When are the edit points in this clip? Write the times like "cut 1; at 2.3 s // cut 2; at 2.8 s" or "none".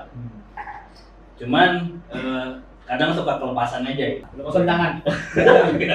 cut 1; at 4.3 s